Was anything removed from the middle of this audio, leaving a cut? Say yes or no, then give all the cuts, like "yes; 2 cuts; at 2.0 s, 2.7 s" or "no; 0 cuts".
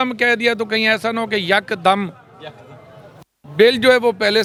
no; 0 cuts